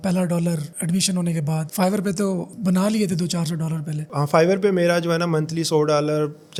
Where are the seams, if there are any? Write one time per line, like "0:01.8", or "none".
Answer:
none